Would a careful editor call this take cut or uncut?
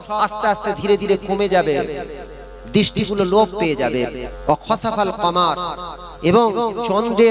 cut